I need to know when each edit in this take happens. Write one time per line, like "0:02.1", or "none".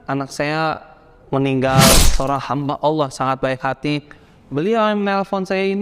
0:02.0